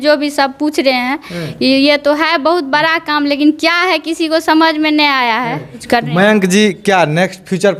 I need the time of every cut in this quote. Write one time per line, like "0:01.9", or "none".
0:05.8